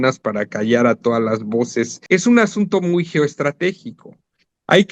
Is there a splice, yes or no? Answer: yes